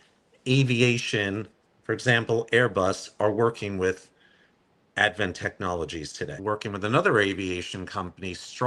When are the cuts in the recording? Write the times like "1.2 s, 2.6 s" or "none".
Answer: 6.4 s